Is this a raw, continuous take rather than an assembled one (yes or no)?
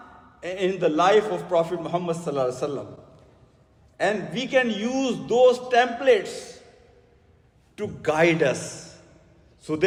yes